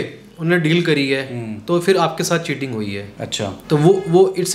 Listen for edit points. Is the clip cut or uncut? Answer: uncut